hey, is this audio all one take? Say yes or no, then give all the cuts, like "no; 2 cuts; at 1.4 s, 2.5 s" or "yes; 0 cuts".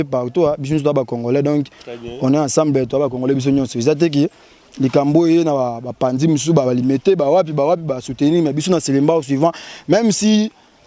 yes; 0 cuts